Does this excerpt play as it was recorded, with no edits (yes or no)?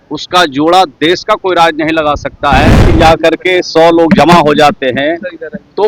no